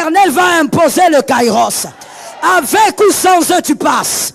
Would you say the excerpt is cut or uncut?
uncut